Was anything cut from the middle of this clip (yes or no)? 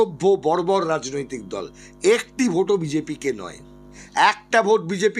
yes